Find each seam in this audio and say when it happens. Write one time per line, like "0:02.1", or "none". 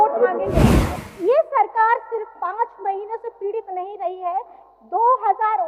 0:01.0